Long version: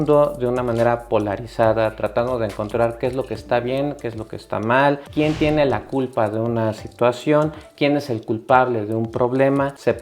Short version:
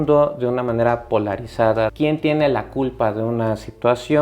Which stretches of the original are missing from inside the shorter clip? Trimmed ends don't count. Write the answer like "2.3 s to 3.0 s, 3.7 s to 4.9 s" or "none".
1.9 s to 5.1 s